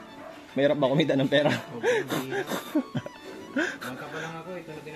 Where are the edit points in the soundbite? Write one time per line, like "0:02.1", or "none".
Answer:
none